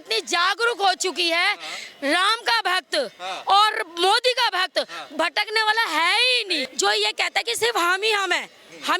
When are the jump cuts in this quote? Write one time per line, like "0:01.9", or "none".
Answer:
0:06.7